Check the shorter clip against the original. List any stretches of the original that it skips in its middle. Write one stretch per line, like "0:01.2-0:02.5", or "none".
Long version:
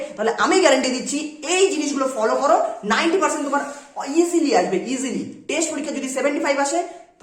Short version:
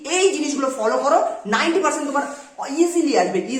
none